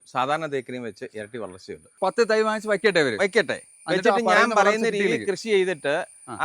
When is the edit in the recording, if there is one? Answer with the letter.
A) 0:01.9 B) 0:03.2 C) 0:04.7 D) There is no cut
A